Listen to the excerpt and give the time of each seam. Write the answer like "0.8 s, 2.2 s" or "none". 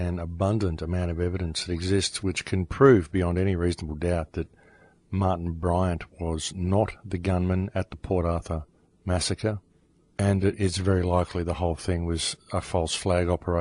6.4 s